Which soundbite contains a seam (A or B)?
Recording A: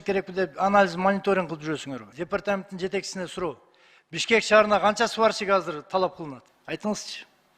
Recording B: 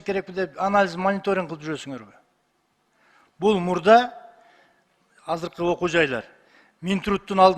A